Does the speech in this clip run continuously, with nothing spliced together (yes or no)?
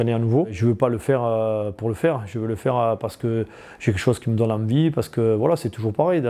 yes